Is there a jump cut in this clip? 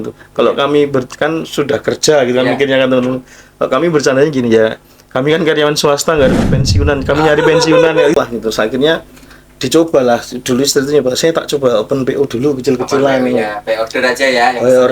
yes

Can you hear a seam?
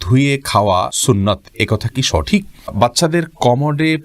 yes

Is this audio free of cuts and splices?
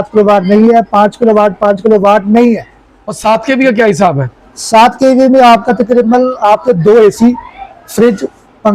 no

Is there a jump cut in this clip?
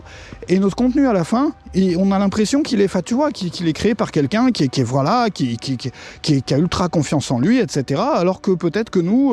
no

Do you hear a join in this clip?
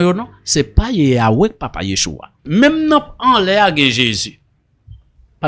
yes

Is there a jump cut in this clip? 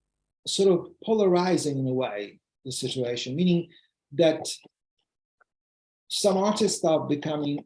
no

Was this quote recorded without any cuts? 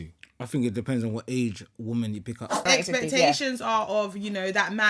no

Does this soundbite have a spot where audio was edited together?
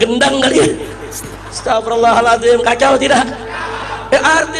no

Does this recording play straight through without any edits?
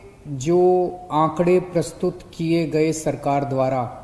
yes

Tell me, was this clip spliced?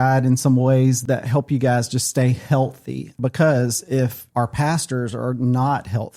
yes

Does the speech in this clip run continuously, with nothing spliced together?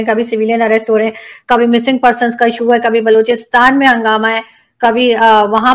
yes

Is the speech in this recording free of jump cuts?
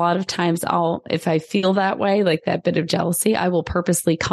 yes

